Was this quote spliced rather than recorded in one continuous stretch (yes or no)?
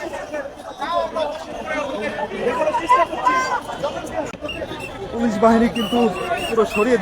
yes